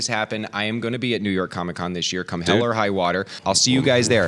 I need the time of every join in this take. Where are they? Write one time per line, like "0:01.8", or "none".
0:03.4